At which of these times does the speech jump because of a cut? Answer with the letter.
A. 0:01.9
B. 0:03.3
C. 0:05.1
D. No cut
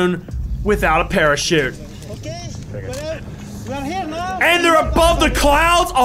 A